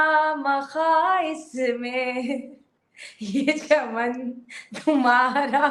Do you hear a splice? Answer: no; 0 cuts

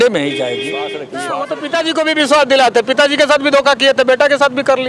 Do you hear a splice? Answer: yes; 1 cut; at 1.1 s

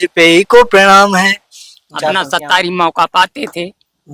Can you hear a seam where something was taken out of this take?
yes; 1 cut; at 2.2 s

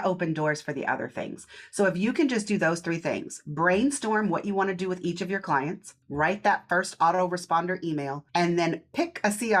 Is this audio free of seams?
no; 2 cuts; at 5.9 s, 8.2 s

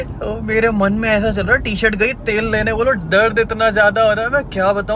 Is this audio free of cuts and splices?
yes; 0 cuts

